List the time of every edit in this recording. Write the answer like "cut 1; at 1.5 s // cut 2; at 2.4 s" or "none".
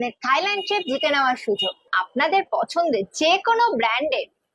cut 1; at 1.9 s